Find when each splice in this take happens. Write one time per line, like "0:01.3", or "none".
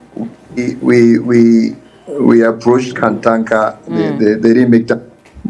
none